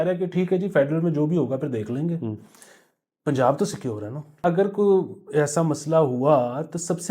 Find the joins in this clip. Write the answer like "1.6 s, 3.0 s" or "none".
4.4 s